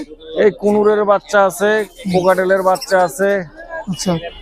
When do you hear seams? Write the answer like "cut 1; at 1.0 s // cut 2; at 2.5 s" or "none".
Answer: none